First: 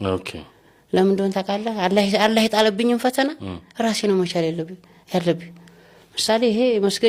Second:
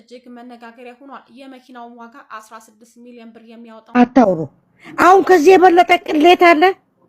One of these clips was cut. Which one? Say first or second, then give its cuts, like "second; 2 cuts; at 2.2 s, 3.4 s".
second; 1 cut; at 3.9 s